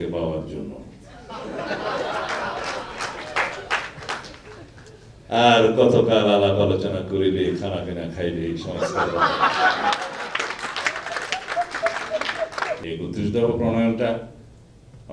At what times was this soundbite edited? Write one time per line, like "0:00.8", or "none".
0:12.7